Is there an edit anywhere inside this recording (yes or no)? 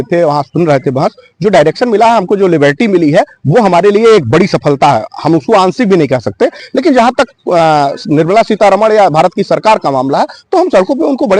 yes